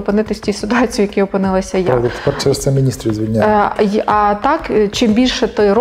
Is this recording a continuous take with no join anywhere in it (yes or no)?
yes